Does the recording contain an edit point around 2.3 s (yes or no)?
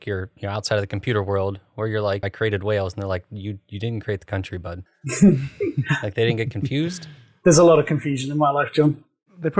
yes